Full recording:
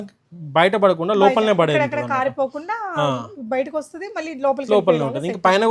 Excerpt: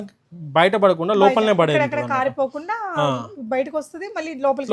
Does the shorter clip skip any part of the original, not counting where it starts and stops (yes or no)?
no